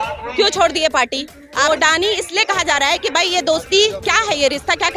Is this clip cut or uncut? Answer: cut